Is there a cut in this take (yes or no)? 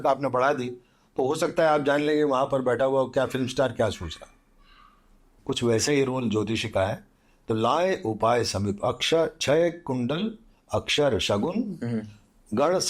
yes